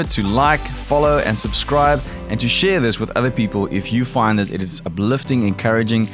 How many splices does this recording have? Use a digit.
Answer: 0